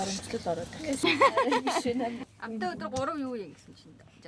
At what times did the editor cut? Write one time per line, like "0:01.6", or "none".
0:01.0
0:02.3